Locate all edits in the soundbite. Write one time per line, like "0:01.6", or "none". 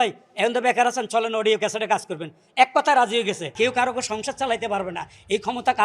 0:03.5